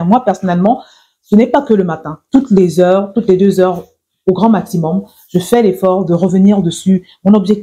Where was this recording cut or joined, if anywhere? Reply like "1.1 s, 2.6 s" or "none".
2.1 s